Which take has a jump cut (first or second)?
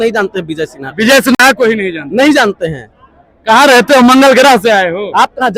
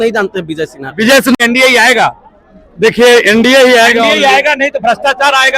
second